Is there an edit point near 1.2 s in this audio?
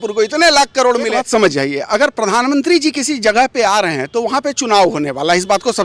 yes; 1 cut; at 1.2 s

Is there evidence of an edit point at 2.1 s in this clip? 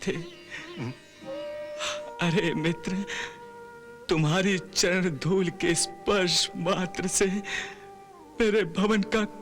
yes; 1 cut; at 2.1 s

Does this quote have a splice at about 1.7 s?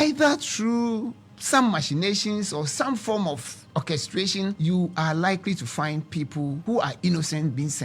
no; 3 cuts; at 3.5 s, 4.6 s, 6.6 s

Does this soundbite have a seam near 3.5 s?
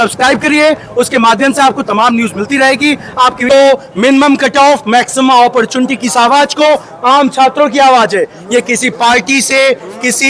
yes; 1 cut; at 3.5 s

